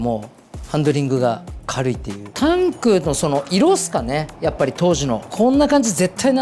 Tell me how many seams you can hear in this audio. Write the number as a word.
one